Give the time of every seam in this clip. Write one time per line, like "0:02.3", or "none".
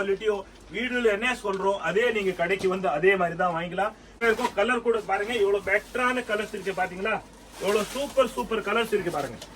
0:04.2